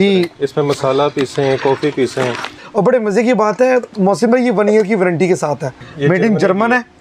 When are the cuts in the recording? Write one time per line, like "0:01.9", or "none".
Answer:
0:02.5
0:05.8